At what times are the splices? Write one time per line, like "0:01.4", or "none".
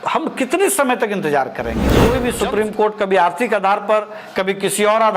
0:02.0